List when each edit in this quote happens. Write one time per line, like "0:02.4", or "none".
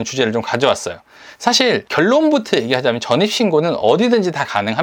none